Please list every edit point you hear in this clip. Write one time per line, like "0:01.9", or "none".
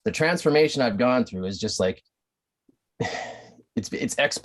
none

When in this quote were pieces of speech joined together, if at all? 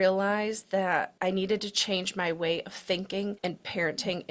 0:01.1
0:03.4

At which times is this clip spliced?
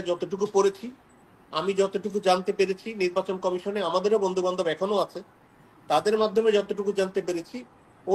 none

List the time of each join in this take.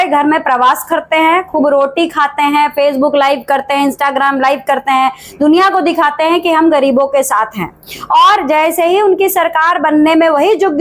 none

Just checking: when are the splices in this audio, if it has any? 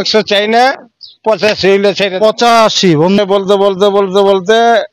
0:03.2

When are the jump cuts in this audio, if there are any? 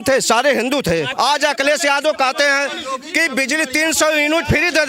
0:01.1

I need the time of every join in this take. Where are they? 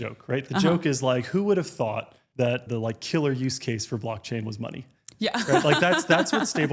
0:02.5

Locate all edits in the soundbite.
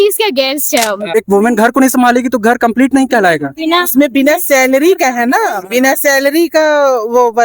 0:01.1

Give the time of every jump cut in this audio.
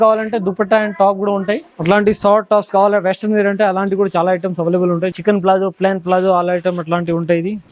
0:01.7
0:05.1

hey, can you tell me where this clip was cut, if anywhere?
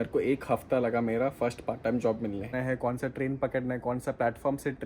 0:02.5

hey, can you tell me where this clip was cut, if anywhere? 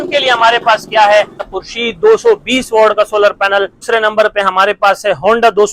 0:01.5
0:03.8

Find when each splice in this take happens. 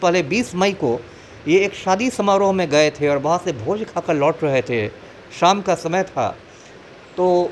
none

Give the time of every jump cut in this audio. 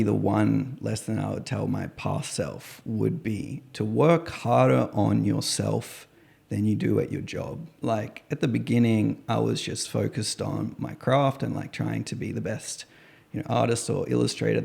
none

